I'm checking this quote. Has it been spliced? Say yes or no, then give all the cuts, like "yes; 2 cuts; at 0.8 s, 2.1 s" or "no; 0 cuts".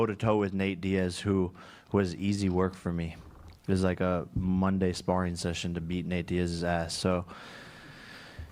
no; 0 cuts